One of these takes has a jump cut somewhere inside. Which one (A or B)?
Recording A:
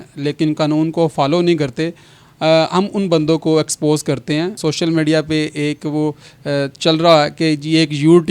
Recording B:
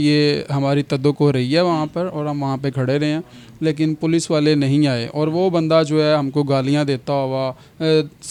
A